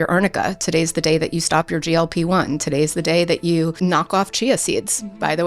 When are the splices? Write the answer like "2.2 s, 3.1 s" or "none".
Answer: 3.8 s